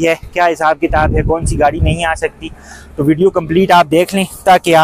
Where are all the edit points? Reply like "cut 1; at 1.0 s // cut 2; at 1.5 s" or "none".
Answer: none